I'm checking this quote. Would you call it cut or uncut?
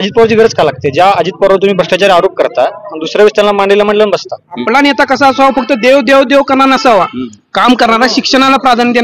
cut